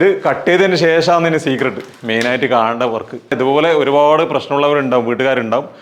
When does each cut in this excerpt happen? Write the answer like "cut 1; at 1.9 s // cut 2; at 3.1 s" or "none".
cut 1; at 3.3 s